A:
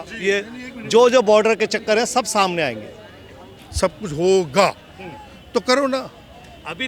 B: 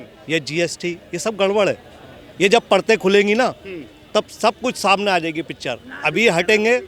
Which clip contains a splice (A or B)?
A